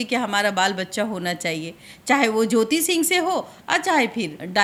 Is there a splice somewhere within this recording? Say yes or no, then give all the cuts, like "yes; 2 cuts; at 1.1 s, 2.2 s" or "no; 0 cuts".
no; 0 cuts